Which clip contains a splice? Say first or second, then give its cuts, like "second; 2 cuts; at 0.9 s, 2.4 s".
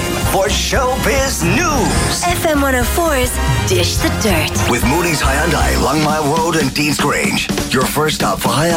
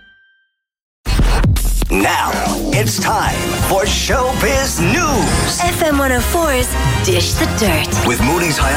second; 1 cut; at 1.0 s